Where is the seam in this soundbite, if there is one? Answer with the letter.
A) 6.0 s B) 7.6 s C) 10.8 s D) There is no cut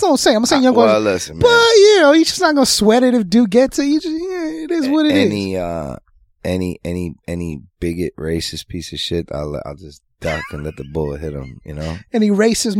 D